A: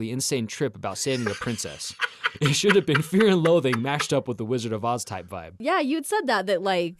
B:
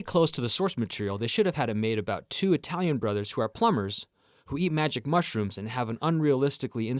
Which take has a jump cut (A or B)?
A